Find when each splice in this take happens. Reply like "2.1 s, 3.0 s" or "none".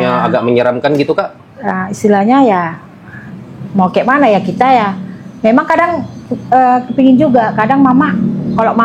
none